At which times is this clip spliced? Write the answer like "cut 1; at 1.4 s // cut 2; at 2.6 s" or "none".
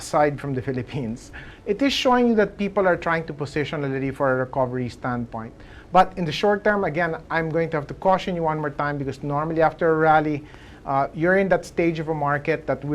cut 1; at 1.5 s